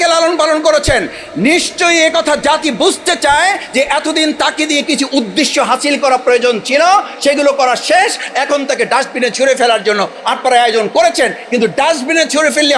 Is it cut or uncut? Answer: uncut